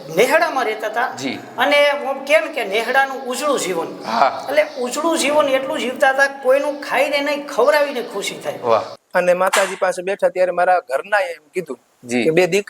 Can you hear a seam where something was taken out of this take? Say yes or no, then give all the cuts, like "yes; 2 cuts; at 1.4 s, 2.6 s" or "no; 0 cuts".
yes; 1 cut; at 8.9 s